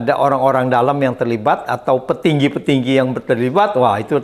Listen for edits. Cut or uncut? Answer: uncut